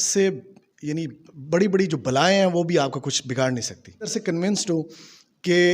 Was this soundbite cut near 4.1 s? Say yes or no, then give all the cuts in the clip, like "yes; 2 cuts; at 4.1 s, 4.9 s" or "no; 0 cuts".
yes; 1 cut; at 4.1 s